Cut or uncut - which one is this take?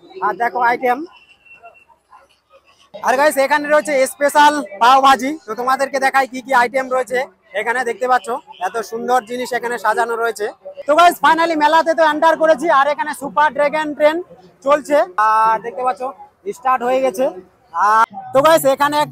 cut